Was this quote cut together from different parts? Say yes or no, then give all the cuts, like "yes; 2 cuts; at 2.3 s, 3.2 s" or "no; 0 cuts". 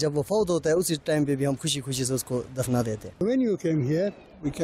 yes; 1 cut; at 3.2 s